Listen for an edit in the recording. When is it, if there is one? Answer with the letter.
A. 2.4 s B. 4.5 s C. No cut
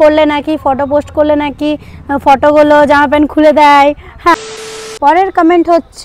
B